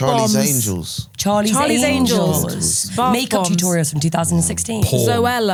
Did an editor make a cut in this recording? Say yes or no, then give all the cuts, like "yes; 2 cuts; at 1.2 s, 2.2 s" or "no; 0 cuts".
no; 0 cuts